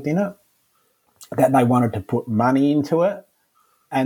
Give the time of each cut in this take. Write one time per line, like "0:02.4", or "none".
none